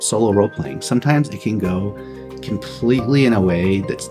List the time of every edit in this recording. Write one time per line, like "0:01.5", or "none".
none